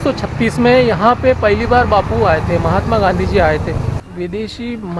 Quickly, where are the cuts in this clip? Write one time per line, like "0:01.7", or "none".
0:04.0